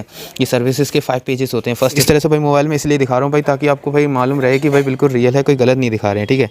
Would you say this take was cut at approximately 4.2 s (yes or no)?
no